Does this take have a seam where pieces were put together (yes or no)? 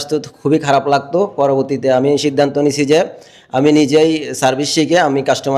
no